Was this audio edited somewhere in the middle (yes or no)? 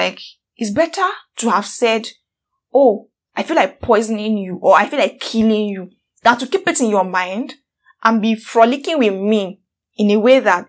no